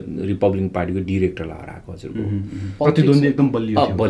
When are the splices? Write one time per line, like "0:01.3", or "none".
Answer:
0:02.7